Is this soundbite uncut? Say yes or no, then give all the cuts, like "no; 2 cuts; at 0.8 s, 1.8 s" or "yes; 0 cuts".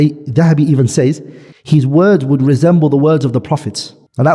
no; 1 cut; at 1.5 s